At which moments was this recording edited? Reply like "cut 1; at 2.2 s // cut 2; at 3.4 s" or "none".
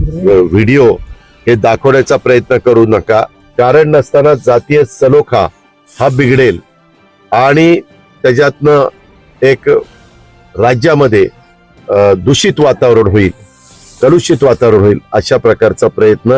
cut 1; at 3.4 s